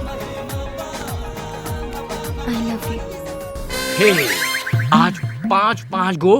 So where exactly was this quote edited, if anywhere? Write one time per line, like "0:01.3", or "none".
0:03.6